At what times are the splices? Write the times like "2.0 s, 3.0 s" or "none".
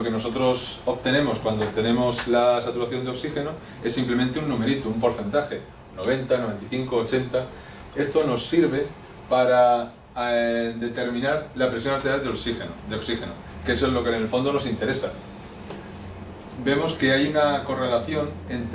none